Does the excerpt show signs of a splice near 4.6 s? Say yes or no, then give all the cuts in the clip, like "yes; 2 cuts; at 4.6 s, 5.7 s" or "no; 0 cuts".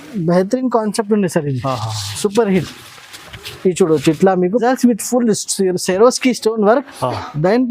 yes; 1 cut; at 4.6 s